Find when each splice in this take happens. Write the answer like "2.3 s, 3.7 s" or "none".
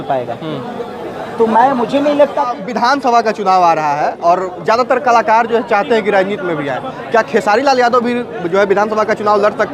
2.5 s